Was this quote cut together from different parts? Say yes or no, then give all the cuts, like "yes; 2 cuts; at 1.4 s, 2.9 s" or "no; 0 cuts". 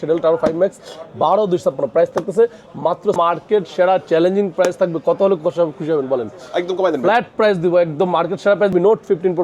yes; 2 cuts; at 3.1 s, 8.7 s